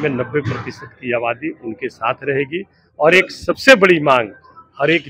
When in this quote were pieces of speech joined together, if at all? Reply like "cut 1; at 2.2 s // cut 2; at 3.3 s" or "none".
none